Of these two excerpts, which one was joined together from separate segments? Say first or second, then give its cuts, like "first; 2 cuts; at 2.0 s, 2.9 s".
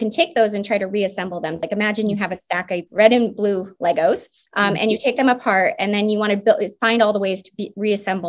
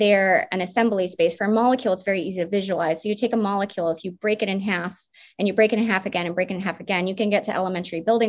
first; 3 cuts; at 1.6 s, 2.9 s, 4.4 s